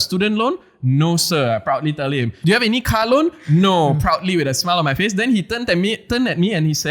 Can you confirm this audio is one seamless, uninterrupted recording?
no; 1 cut; at 2.3 s

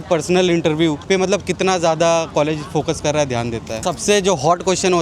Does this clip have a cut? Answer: yes; 2 cuts; at 1.0 s, 3.8 s

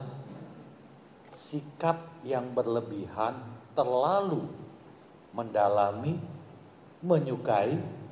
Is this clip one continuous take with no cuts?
yes; 0 cuts

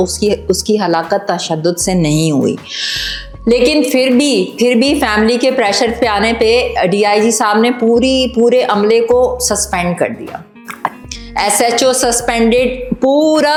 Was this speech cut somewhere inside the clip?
no; 0 cuts

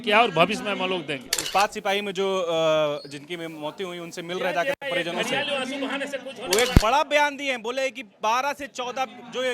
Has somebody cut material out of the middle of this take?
yes; 1 cut; at 1.4 s

